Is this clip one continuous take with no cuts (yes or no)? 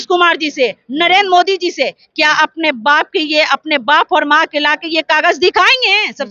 yes